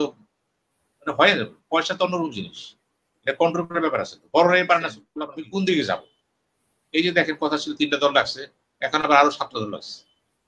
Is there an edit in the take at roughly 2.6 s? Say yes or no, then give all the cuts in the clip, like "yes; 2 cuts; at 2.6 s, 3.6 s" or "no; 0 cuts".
no; 1 cut; at 5.1 s